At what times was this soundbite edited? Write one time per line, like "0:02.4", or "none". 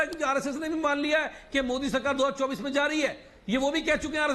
0:03.3

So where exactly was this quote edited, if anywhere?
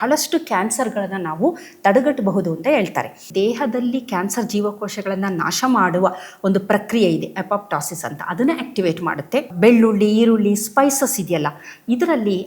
0:03.2
0:09.5

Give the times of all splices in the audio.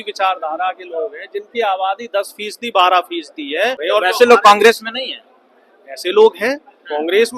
0:03.8

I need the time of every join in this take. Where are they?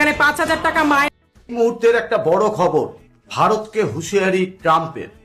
0:01.1

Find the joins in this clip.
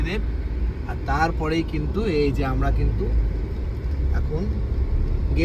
none

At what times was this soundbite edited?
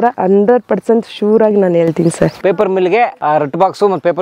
0:02.4
0:03.2

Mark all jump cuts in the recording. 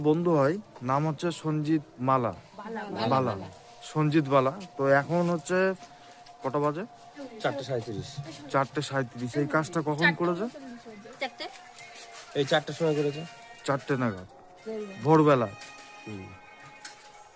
0:01.9

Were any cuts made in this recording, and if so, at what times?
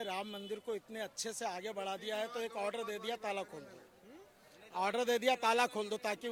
none

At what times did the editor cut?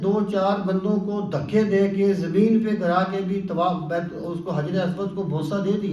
none

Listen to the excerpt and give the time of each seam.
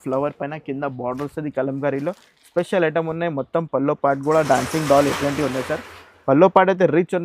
none

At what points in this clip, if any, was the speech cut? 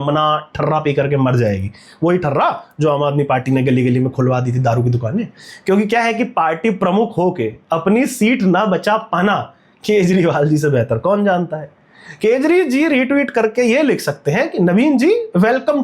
none

